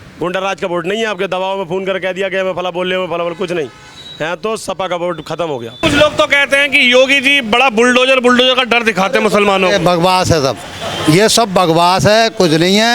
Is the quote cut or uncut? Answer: cut